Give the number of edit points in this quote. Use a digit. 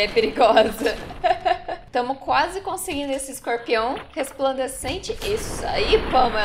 1